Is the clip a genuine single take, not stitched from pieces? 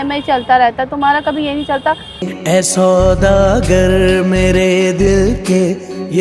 yes; 0 cuts

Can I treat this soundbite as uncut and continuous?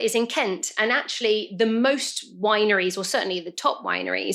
yes; 0 cuts

